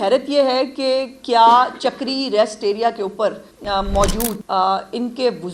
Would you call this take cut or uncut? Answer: cut